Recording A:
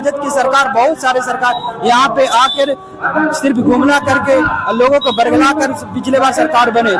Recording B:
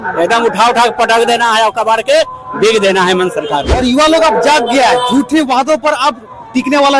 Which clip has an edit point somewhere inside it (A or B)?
B